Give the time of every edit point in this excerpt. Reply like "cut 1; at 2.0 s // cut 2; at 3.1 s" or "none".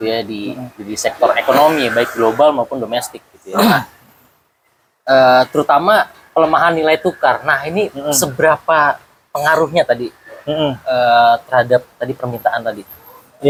none